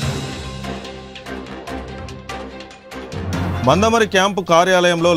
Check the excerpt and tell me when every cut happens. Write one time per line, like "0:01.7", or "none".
none